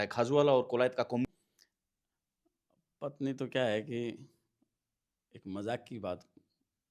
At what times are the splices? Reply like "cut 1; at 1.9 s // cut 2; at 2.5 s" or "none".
cut 1; at 1.2 s